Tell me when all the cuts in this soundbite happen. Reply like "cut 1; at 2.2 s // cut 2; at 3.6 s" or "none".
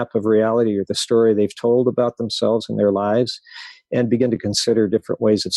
none

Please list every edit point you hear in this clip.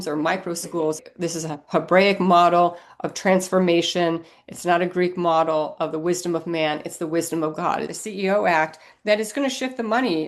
cut 1; at 1.0 s // cut 2; at 8.0 s

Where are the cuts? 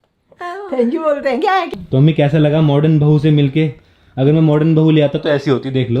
cut 1; at 1.7 s

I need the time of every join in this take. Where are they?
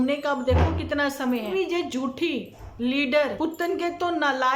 cut 1; at 1.5 s // cut 2; at 3.3 s

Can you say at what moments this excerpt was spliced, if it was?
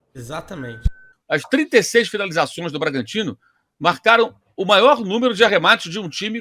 cut 1; at 1.1 s

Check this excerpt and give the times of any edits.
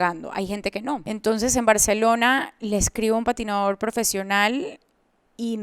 cut 1; at 1.0 s

